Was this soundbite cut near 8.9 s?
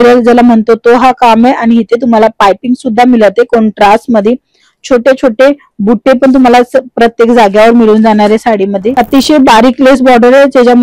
yes; 1 cut; at 8.9 s

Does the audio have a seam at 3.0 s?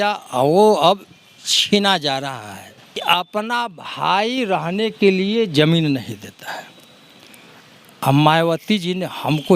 yes; 1 cut; at 3.0 s

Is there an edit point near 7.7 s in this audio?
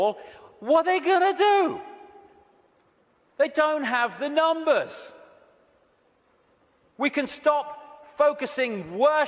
yes; 1 cut; at 7.7 s

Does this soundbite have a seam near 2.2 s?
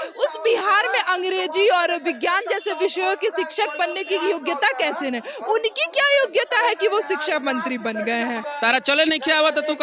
no; 1 cut; at 8.5 s

